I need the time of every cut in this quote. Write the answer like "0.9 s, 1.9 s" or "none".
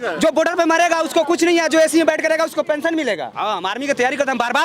3.3 s